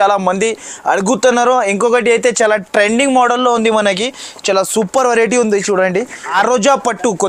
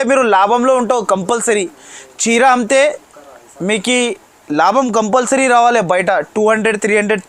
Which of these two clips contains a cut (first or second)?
first